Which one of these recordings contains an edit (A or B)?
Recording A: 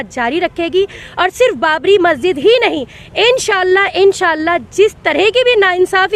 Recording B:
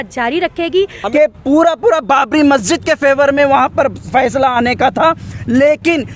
B